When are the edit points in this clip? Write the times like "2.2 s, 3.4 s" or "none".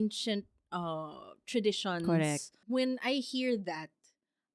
2.5 s

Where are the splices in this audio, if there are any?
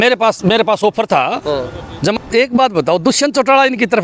2.1 s

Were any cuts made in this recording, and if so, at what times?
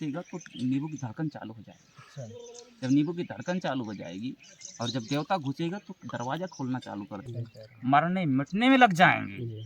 7.2 s

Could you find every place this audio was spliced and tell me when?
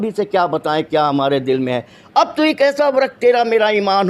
1.9 s

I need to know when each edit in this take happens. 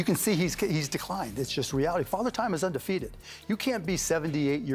none

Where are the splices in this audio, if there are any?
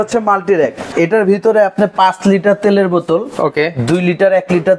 0.9 s

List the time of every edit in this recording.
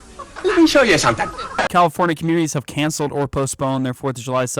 1.6 s

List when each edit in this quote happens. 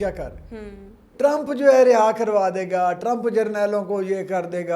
1.1 s

